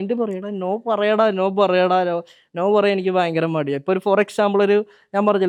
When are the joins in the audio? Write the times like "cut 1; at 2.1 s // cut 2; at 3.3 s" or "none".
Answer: none